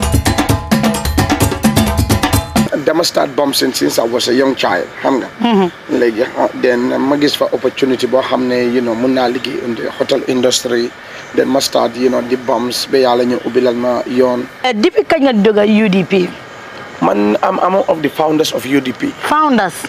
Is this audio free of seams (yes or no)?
no